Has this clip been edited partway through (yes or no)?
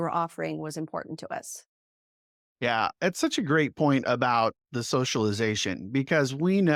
no